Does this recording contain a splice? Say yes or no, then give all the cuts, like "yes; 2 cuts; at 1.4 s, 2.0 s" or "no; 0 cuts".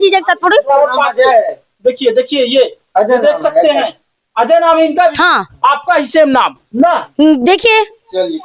no; 0 cuts